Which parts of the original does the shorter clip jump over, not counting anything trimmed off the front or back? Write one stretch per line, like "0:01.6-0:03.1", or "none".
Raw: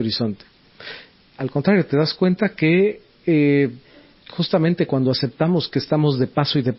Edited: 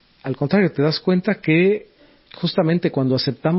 0:03.1-0:03.9